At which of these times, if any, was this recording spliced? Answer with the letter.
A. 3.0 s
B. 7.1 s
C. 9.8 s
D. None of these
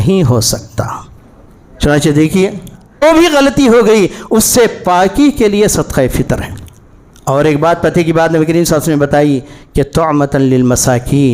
A